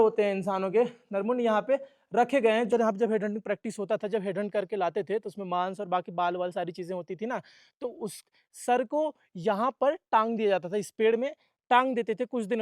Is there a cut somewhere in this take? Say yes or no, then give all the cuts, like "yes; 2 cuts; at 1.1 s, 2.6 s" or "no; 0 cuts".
yes; 1 cut; at 2.7 s